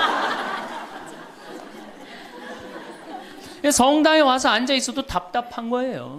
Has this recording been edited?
no; 0 cuts

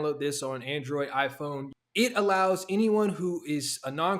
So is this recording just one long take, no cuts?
no; 1 cut; at 1.7 s

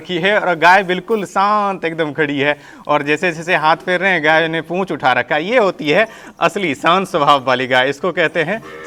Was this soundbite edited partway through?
no; 0 cuts

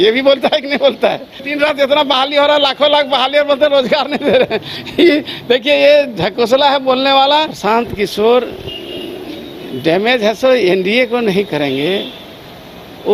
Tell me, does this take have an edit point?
yes; 2 cuts; at 1.4 s, 7.5 s

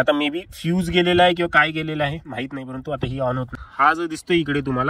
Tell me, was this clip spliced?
yes; 1 cut; at 3.6 s

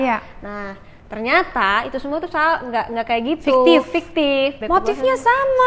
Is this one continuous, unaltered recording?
no; 1 cut; at 4.6 s

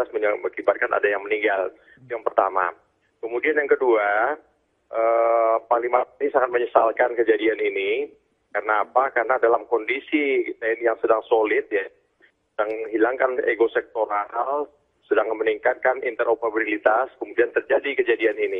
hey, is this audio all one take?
no; 1 cut; at 15.3 s

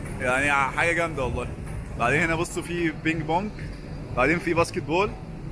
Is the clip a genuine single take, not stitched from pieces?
yes; 0 cuts

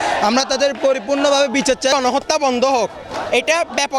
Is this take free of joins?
no; 1 cut; at 1.9 s

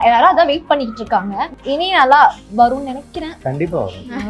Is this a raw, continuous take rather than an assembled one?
no; 2 cuts; at 1.6 s, 3.3 s

